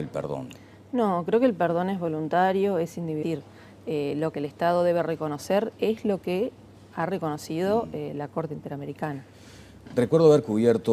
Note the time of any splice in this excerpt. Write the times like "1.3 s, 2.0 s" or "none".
none